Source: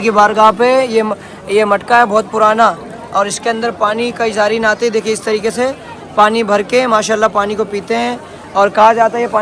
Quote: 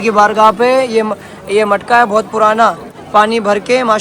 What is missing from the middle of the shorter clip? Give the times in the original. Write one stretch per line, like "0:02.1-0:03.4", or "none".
0:02.9-0:05.9